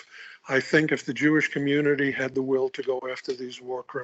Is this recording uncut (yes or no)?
no